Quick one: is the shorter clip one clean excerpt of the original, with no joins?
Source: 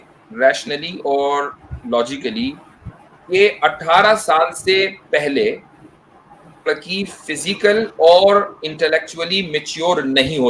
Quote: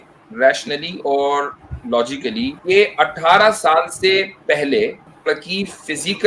no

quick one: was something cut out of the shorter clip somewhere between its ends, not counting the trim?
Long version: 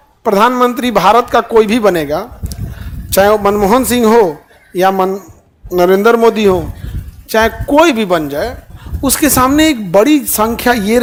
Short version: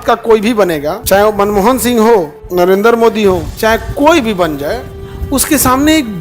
yes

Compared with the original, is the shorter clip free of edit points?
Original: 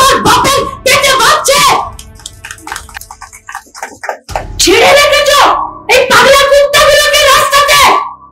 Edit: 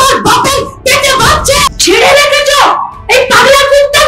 no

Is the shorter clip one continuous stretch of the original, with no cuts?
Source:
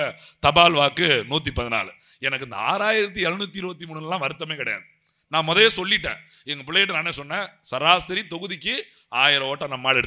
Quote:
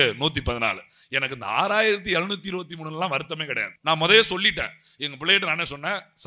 no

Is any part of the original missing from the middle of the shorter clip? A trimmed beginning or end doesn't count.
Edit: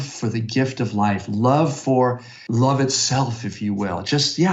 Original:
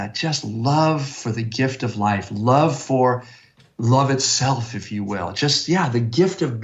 yes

